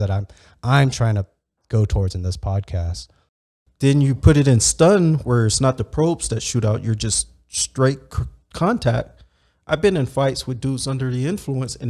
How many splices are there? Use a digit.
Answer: 1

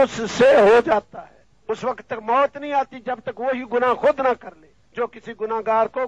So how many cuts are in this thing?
0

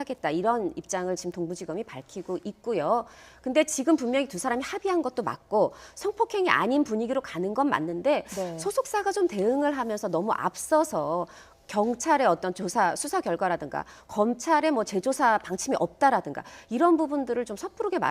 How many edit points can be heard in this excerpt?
1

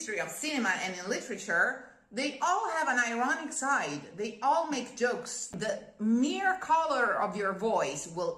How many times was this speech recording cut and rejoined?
1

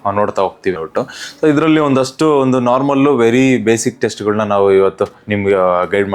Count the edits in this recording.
0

